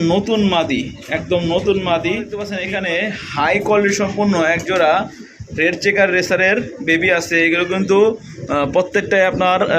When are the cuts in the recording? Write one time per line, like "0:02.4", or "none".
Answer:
0:02.6